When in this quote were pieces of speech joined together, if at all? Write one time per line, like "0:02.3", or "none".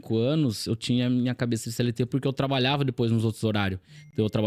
none